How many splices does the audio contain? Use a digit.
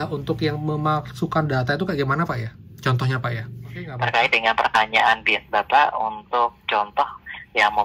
1